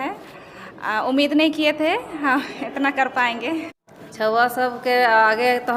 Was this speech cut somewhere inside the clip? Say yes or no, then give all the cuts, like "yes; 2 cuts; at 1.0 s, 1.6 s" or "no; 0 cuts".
yes; 1 cut; at 3.8 s